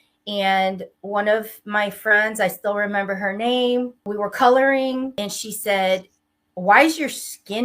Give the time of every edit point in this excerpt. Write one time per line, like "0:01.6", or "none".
0:04.1
0:05.2